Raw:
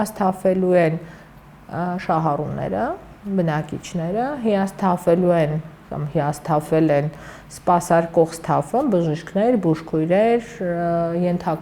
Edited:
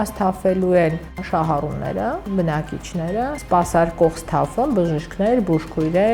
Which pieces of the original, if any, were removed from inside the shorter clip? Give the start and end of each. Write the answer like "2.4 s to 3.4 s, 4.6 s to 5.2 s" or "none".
1.2 s to 2.0 s, 3.0 s to 3.2 s, 4.4 s to 7.5 s